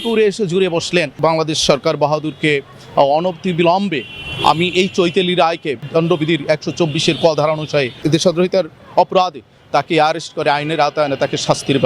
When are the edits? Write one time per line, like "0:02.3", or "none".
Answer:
0:01.1
0:05.8
0:08.0